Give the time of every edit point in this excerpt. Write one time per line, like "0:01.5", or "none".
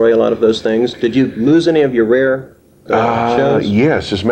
none